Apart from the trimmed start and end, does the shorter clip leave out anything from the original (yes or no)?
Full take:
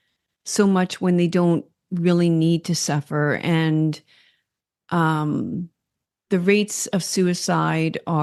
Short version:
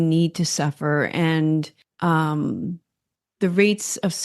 yes